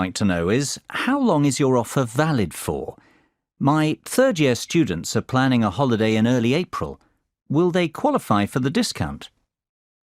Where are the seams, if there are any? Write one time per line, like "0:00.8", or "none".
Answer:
0:05.7